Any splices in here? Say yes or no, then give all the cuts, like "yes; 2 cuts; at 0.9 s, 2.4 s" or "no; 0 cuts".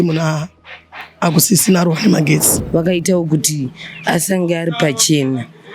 yes; 1 cut; at 2.6 s